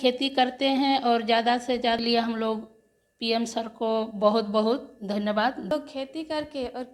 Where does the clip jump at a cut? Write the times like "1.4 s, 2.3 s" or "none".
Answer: 2.0 s, 5.7 s